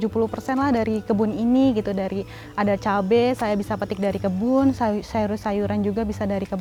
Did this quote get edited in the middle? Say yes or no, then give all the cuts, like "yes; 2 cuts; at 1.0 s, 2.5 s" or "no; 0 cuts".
no; 0 cuts